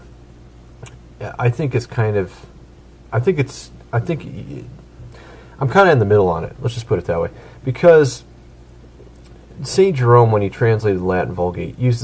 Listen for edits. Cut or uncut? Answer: uncut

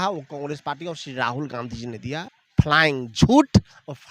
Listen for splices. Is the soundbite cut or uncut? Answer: cut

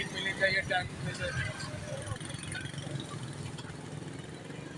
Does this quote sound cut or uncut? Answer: uncut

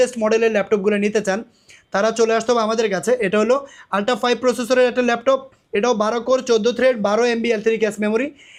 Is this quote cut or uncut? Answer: uncut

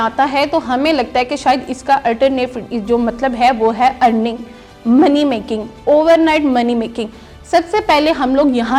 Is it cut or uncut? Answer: uncut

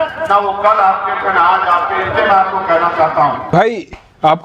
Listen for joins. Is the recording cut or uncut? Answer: cut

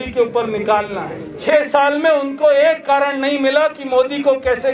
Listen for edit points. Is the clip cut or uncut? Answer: cut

